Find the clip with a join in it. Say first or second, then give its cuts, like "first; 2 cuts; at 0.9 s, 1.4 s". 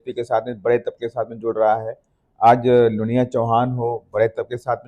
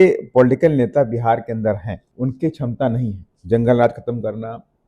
second; 2 cuts; at 2.0 s, 3.3 s